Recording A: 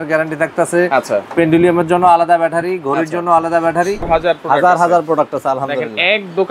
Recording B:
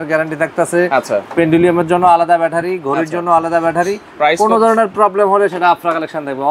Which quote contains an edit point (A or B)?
A